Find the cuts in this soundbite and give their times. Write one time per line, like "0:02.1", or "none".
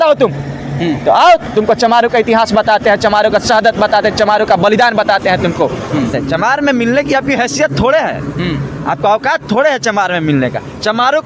0:06.1